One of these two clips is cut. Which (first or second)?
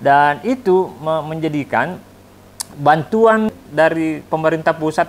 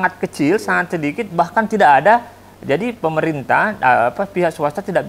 first